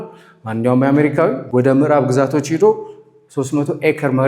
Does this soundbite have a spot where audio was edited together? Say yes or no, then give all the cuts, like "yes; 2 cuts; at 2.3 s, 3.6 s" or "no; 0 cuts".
yes; 1 cut; at 1.4 s